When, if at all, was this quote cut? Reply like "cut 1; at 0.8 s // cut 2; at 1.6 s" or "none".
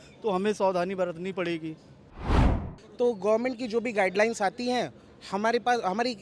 cut 1; at 2.4 s

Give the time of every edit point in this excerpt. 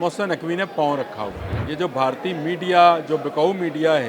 cut 1; at 1.5 s

